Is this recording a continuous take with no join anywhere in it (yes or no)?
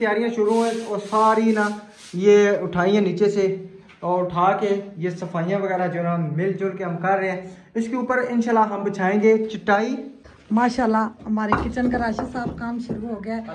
no